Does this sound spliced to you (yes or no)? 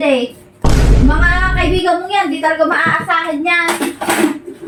no